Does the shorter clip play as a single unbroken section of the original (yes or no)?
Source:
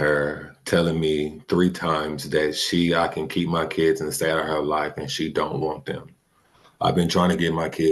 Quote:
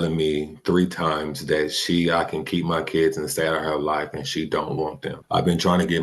no